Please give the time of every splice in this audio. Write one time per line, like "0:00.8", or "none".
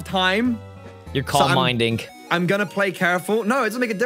none